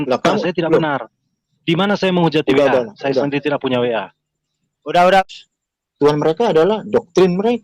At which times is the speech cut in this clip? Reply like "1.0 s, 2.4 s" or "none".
5.2 s